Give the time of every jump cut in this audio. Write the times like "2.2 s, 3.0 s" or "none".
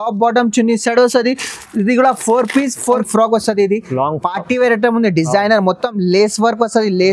3.0 s